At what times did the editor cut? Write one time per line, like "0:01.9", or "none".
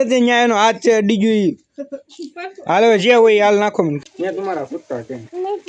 0:04.0